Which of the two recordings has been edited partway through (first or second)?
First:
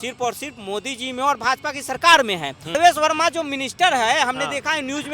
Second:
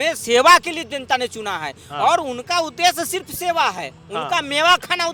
first